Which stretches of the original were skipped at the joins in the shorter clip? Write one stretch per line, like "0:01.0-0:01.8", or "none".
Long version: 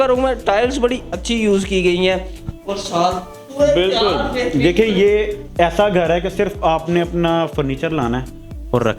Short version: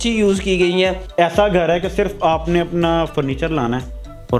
0:02.3-0:05.4